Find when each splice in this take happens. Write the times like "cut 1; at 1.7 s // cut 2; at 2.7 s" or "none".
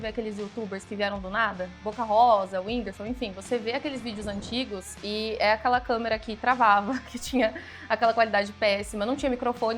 cut 1; at 1.8 s